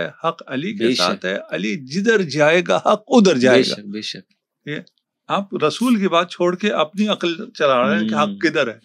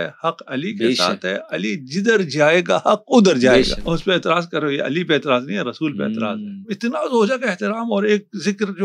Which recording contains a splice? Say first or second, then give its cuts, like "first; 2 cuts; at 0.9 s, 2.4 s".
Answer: second; 2 cuts; at 3.8 s, 6.7 s